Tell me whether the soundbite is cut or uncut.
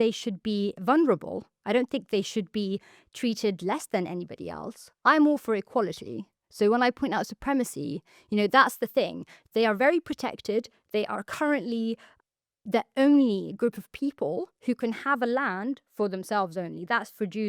uncut